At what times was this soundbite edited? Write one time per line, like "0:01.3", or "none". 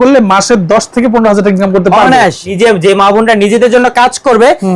0:02.5